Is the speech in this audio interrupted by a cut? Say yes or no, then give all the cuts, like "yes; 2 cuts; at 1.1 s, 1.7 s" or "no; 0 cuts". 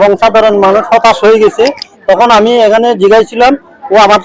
no; 0 cuts